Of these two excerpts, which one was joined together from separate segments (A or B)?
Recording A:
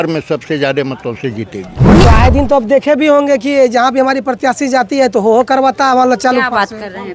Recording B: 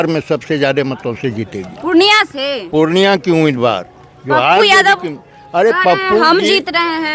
A